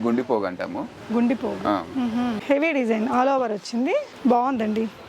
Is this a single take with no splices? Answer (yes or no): no